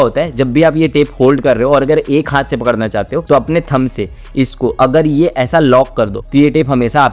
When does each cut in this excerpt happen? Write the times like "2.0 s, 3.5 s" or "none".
none